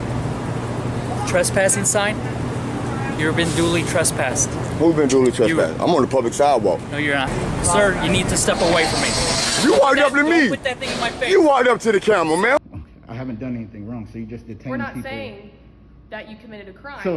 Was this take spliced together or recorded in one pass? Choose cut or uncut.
cut